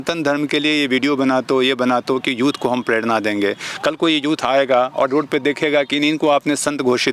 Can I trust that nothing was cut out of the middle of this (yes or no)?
yes